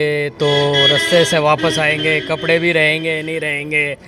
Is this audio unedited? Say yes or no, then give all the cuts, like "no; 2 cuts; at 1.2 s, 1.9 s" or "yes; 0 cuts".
yes; 0 cuts